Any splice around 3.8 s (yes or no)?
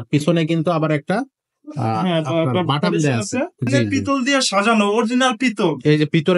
yes